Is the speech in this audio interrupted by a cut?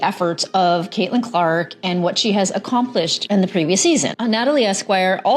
yes; 1 cut; at 4.1 s

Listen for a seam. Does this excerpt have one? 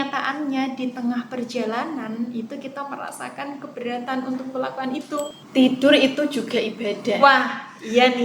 yes; 1 cut; at 5.4 s

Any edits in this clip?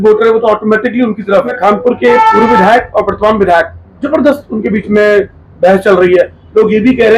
yes; 1 cut; at 1.5 s

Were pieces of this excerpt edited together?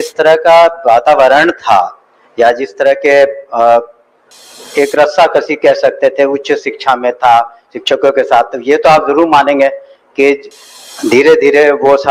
no; 0 cuts

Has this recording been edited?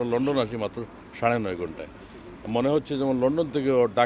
no; 0 cuts

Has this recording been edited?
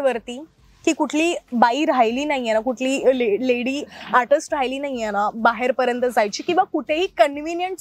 no; 0 cuts

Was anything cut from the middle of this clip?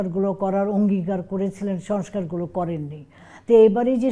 no; 0 cuts

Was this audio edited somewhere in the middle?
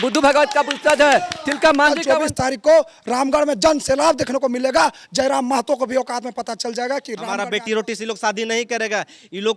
yes; 2 cuts; at 2.0 s, 7.4 s

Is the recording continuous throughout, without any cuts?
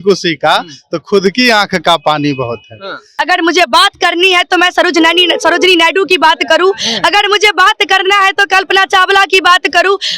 no; 1 cut; at 3.1 s

